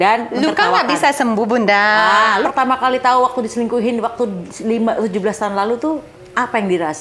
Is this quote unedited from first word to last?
no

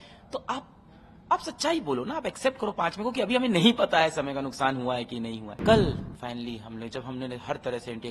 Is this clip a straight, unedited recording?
no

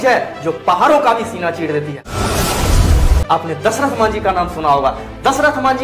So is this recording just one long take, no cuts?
no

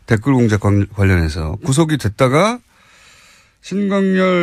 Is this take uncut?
yes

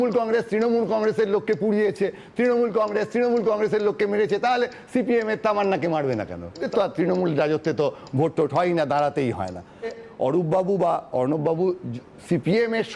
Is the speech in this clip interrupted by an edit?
yes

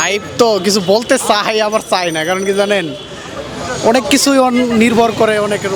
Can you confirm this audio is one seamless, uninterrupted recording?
yes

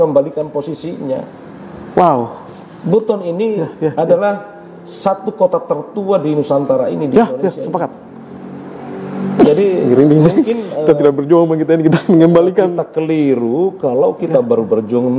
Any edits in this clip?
no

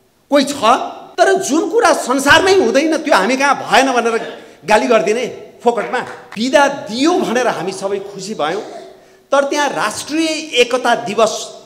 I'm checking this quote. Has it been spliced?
yes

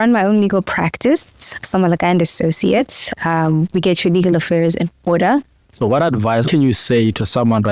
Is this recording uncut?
no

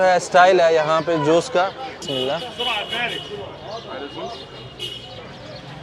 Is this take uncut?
no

